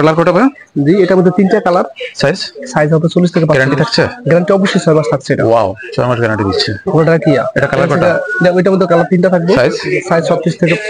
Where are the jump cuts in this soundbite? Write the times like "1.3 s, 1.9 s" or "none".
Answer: none